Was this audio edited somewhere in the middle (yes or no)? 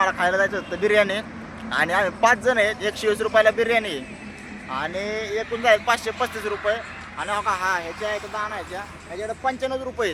no